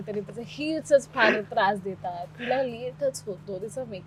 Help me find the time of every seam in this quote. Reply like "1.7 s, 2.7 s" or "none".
none